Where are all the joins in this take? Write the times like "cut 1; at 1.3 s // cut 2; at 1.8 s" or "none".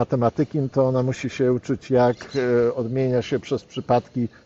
none